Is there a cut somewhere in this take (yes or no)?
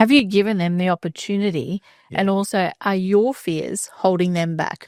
no